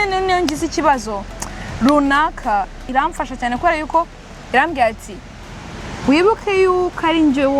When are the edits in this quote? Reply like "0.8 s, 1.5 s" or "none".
2.9 s